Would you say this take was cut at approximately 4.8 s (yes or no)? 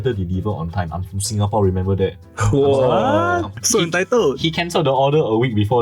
no